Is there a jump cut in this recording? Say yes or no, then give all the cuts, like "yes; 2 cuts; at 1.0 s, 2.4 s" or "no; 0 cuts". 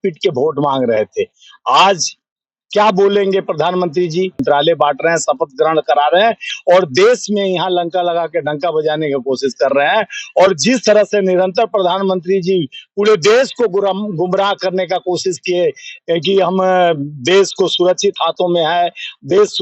yes; 1 cut; at 4.4 s